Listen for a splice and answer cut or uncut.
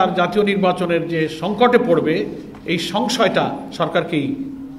uncut